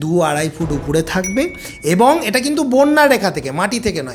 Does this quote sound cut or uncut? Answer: uncut